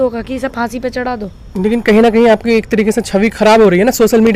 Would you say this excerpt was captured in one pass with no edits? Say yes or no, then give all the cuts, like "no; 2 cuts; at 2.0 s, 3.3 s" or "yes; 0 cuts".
yes; 0 cuts